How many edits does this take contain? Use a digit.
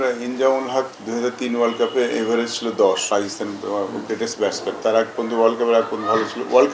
3